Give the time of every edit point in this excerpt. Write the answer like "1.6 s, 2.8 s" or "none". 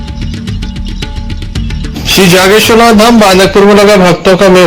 1.2 s